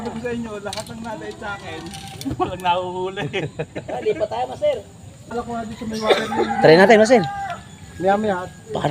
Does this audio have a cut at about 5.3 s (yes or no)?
yes